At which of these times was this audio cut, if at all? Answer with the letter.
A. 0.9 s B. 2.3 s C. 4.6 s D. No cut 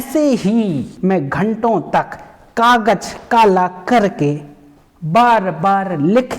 A